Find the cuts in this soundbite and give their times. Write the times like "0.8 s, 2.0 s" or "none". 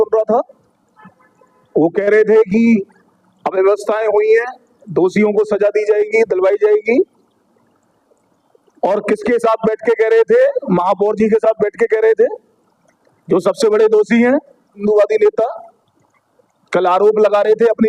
14.8 s

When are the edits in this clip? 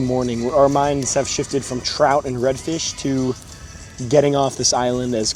none

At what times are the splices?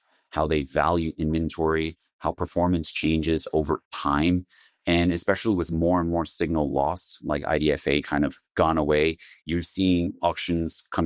3.9 s

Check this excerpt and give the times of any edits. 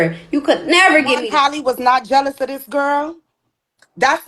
1.2 s

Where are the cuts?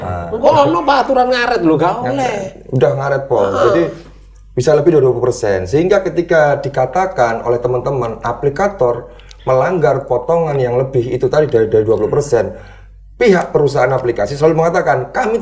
none

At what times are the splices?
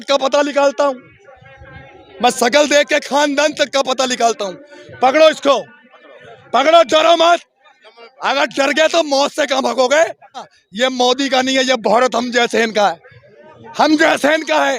10.6 s

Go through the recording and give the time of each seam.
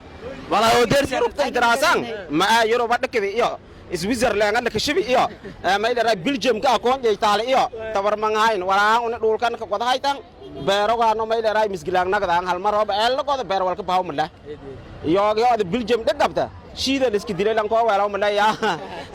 none

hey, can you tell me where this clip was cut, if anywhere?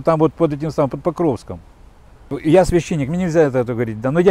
2.4 s

